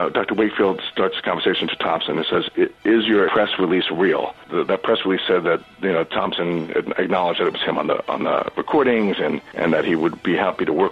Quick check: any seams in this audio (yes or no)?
yes